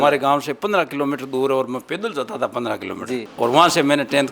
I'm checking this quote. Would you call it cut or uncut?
cut